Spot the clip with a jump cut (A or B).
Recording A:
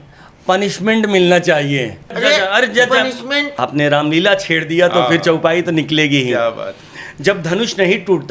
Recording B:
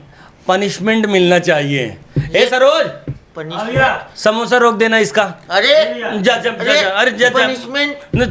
A